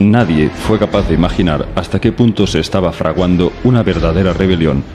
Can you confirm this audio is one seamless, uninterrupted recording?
no; 1 cut; at 1.0 s

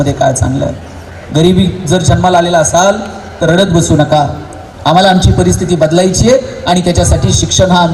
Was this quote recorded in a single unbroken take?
yes; 0 cuts

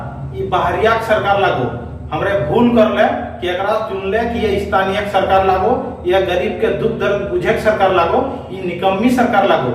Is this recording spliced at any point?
no; 0 cuts

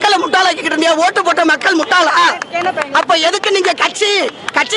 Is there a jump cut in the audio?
no; 0 cuts

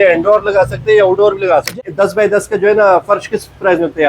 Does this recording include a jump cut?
yes; 1 cut; at 1.7 s

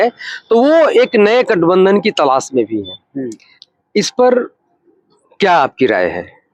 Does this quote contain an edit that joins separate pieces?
no; 0 cuts

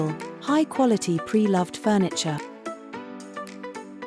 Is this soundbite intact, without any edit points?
no; 1 cut; at 2.4 s

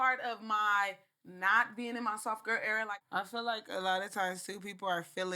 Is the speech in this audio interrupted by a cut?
yes; 1 cut; at 2.9 s

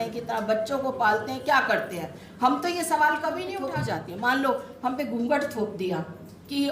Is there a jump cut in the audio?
yes; 1 cut; at 3.5 s

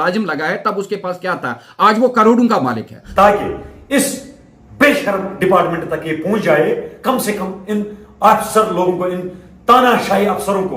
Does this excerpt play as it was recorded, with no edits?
no; 1 cut; at 3.0 s

